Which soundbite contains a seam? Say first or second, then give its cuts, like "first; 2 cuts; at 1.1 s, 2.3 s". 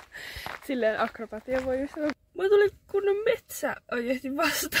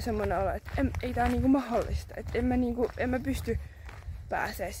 first; 1 cut; at 2.1 s